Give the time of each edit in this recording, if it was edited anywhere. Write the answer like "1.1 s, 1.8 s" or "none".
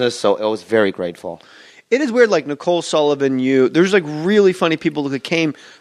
none